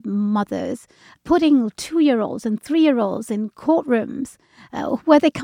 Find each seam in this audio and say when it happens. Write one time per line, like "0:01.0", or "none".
0:01.1